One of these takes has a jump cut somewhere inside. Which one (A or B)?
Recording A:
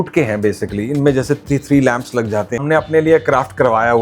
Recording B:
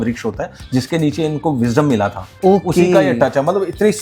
A